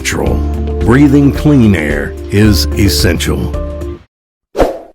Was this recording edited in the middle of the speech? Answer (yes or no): yes